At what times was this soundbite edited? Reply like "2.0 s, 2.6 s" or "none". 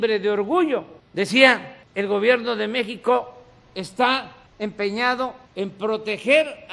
1.0 s, 1.8 s, 4.4 s, 5.4 s